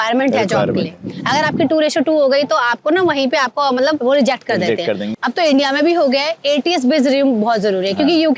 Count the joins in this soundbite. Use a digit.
1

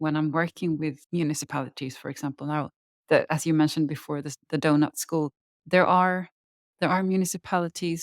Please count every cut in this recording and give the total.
2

